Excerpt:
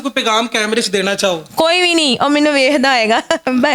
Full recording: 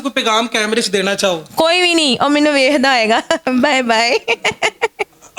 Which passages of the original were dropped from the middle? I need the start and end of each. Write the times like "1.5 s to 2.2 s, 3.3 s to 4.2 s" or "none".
none